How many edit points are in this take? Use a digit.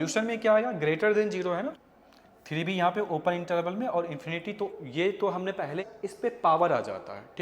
3